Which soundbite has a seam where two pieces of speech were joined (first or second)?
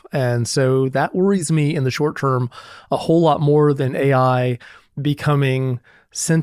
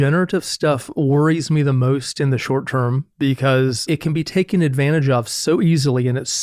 second